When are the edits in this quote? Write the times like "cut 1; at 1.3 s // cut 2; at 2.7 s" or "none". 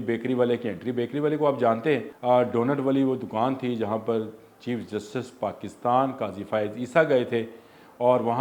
cut 1; at 2.1 s